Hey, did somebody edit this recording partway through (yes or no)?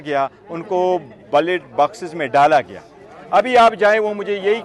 no